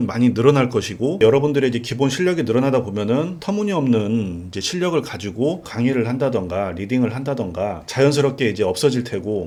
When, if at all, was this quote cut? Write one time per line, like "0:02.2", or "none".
none